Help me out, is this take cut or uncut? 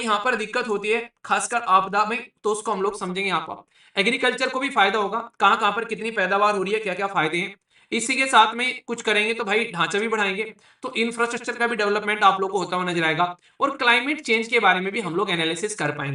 uncut